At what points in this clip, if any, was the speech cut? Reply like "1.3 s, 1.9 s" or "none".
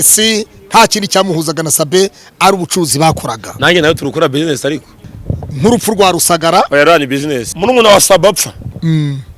5.0 s, 7.5 s